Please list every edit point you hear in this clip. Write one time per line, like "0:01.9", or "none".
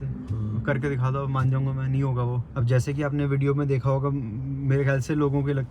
none